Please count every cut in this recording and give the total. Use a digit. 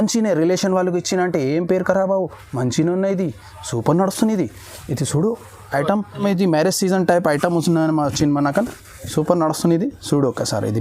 1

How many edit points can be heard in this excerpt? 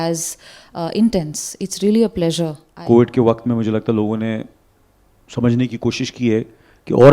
1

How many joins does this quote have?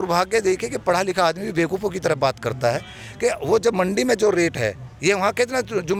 0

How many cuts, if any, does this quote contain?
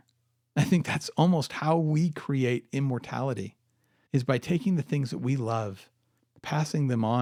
0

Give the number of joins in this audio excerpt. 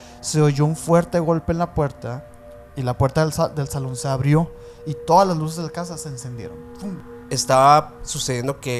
1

